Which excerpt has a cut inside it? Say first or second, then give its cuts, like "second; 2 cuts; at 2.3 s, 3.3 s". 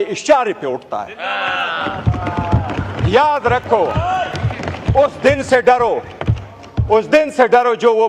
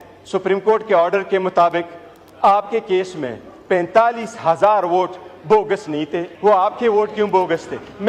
second; 1 cut; at 6.3 s